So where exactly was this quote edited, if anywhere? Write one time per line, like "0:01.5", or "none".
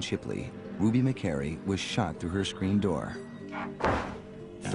0:02.5